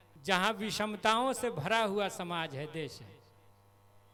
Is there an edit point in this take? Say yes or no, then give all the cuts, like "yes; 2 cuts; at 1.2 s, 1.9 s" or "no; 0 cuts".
no; 0 cuts